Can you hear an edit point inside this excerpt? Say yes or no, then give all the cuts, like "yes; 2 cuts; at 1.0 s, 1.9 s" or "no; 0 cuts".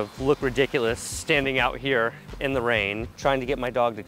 no; 0 cuts